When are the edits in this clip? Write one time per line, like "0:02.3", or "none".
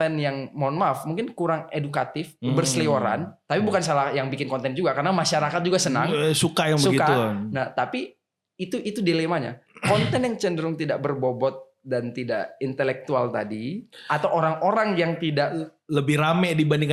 none